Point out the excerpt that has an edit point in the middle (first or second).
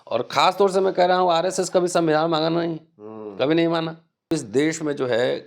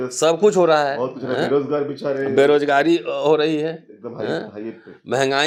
first